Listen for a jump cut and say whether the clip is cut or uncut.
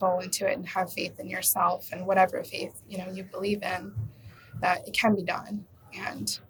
uncut